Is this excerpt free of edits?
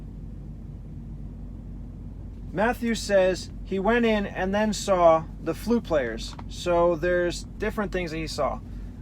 no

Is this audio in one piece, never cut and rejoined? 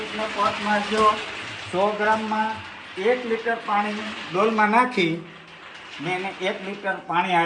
yes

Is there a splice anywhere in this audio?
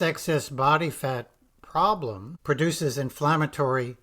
yes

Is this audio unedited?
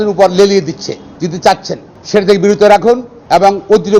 no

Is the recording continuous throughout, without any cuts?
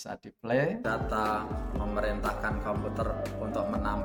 yes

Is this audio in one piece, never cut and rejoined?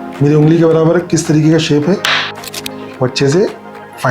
no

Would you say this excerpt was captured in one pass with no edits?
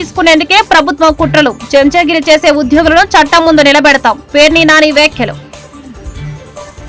yes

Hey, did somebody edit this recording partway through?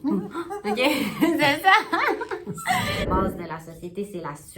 yes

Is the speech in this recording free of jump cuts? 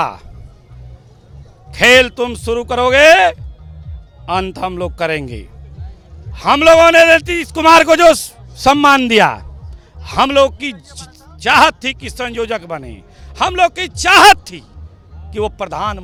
yes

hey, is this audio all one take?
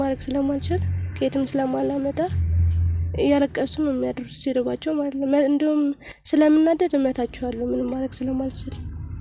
yes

